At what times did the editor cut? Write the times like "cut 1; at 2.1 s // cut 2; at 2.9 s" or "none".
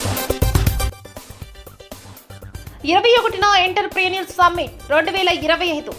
cut 1; at 0.9 s // cut 2; at 2.5 s